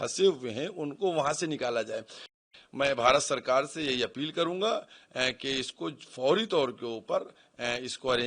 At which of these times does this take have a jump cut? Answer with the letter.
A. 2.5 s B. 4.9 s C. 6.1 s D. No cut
A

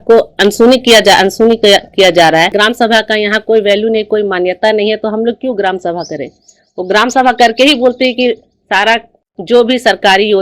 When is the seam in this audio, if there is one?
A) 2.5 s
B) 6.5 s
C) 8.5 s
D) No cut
A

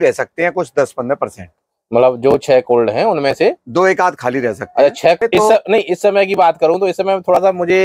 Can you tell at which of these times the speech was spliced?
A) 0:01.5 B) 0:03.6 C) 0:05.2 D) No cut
C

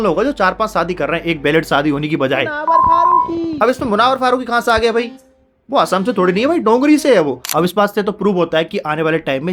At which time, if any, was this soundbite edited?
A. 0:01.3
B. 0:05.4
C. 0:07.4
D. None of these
C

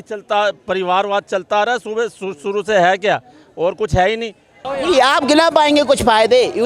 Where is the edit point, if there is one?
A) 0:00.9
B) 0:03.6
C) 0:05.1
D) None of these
D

